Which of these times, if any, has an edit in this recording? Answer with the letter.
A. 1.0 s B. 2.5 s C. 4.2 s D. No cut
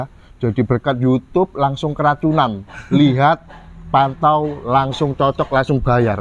D